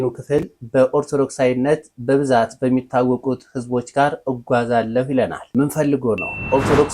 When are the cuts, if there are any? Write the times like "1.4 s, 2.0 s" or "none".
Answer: 5.4 s